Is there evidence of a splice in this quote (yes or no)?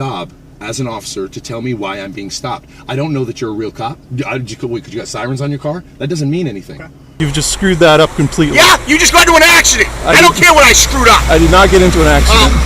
yes